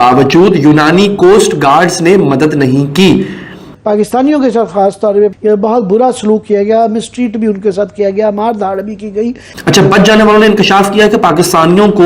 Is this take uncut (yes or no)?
no